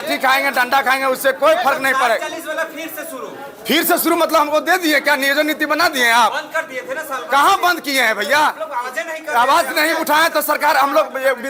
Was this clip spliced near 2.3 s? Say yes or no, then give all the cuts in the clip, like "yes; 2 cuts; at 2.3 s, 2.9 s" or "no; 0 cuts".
no; 0 cuts